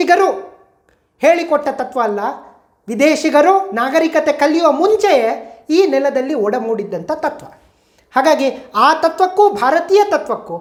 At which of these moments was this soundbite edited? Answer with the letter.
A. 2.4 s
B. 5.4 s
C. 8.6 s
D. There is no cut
D